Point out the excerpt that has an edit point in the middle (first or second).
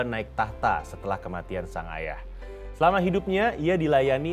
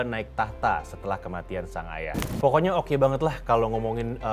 second